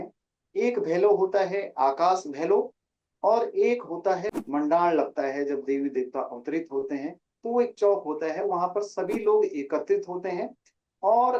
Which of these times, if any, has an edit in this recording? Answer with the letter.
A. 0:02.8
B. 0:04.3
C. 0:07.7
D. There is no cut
B